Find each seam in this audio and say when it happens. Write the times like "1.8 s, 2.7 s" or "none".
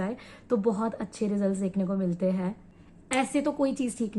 2.7 s